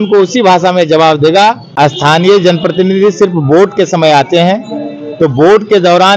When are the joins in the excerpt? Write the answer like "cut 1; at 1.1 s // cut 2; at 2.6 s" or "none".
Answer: cut 1; at 1.6 s